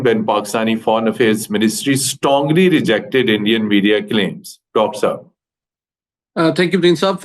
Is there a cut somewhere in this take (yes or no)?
no